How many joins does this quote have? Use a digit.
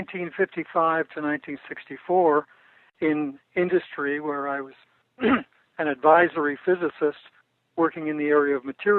0